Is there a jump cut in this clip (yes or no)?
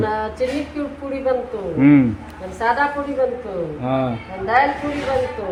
no